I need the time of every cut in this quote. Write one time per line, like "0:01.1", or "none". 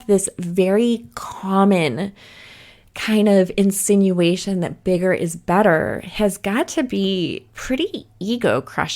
0:07.5